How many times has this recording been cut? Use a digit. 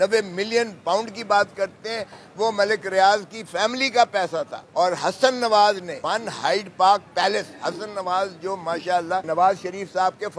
3